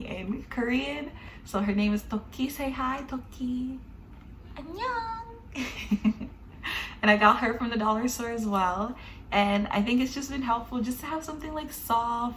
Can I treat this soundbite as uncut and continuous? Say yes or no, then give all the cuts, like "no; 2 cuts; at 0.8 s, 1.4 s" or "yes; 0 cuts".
yes; 0 cuts